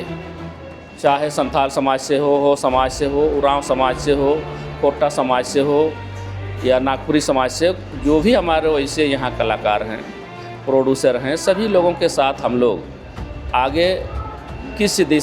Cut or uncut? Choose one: uncut